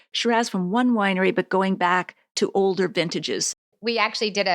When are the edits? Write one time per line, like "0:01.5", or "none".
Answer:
0:02.2
0:03.6